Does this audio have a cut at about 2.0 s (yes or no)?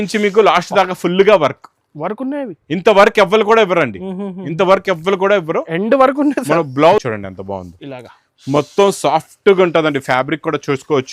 no